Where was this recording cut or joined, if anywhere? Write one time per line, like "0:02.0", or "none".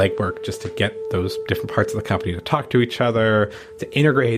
none